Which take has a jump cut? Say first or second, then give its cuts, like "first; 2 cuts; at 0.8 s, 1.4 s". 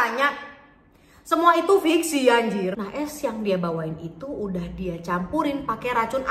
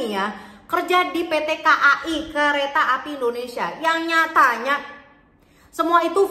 first; 1 cut; at 2.8 s